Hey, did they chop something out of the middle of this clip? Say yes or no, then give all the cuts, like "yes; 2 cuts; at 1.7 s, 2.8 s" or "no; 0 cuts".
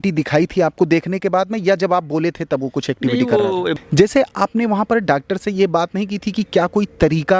yes; 1 cut; at 3.7 s